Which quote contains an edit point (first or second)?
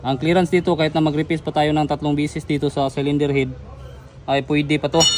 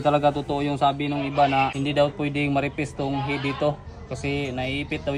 second